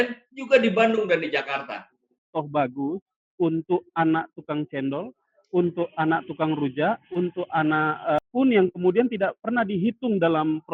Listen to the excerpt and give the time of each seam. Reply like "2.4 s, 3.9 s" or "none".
2.3 s